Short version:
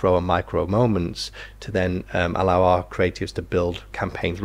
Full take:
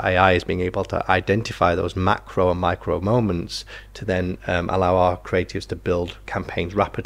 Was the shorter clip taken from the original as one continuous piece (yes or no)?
yes